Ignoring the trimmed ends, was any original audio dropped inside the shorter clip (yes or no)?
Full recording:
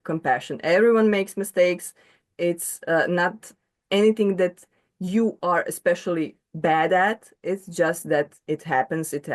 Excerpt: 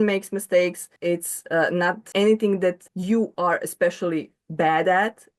yes